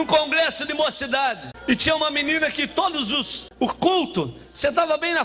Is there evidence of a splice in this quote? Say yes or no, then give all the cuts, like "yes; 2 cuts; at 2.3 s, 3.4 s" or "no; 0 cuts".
yes; 2 cuts; at 1.5 s, 3.4 s